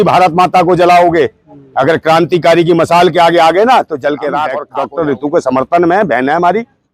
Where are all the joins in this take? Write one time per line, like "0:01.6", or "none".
0:04.6